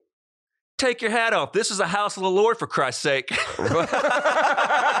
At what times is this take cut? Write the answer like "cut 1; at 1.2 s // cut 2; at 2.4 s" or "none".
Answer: none